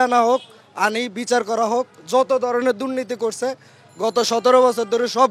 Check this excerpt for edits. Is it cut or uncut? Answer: uncut